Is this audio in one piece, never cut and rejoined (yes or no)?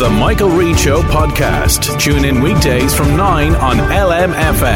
yes